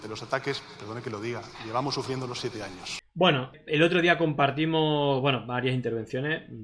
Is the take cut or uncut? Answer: uncut